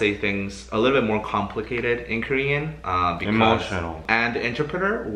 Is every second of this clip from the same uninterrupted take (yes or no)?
no